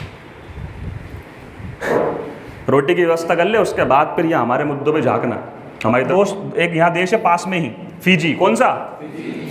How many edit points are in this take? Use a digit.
1